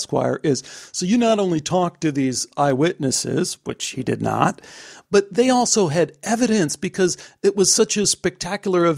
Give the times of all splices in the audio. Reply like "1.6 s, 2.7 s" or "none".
4.9 s